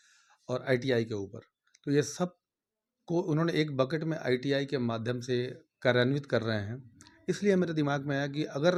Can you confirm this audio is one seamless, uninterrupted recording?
yes; 0 cuts

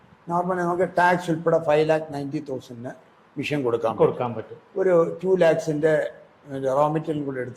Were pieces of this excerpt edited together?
no; 0 cuts

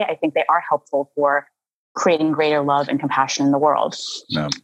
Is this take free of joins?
yes; 0 cuts

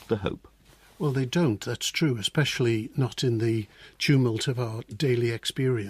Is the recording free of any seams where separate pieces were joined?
yes; 0 cuts

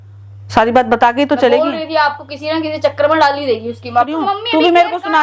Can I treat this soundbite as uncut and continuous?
no; 1 cut; at 3.9 s

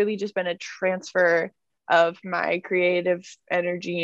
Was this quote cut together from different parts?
no; 0 cuts

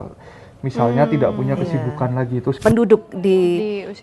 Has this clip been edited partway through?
yes; 1 cut; at 2.6 s

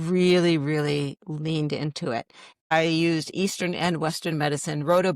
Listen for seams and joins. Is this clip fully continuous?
no; 1 cut; at 2.4 s

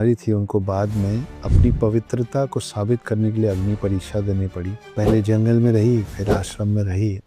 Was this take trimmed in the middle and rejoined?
no; 0 cuts

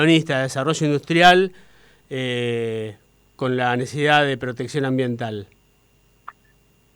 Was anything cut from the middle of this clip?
no; 0 cuts

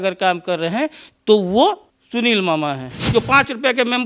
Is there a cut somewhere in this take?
yes; 2 cuts; at 1.9 s, 2.9 s

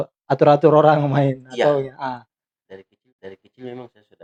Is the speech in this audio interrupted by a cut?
no; 0 cuts

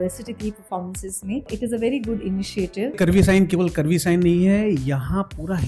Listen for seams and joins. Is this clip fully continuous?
no; 2 cuts; at 1.5 s, 3.0 s

